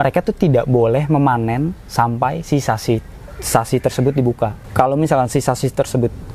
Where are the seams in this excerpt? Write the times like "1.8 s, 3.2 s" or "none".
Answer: none